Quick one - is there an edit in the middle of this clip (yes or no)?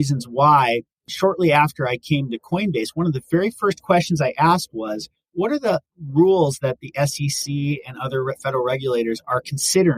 no